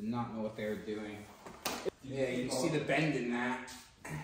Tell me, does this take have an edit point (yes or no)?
yes